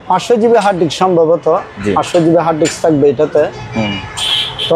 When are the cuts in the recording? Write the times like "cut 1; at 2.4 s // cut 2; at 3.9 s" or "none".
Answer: none